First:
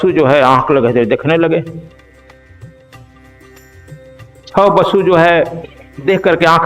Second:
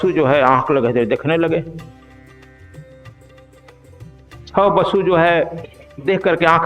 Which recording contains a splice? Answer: first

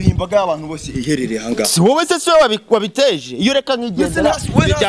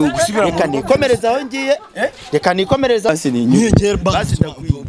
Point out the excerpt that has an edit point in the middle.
second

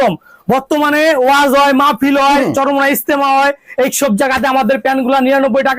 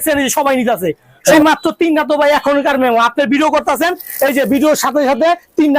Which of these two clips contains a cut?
second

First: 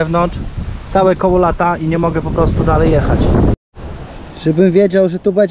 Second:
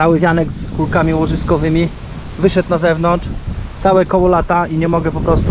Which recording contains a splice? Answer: first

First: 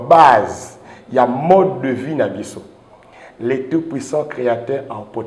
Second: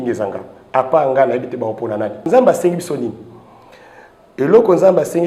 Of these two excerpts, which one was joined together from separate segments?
second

